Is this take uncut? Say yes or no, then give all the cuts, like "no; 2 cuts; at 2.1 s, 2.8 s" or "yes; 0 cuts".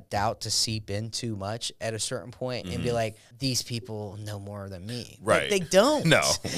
no; 1 cut; at 3.2 s